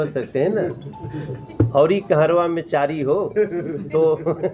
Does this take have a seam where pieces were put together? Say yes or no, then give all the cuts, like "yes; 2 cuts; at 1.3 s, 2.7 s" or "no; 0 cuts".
no; 0 cuts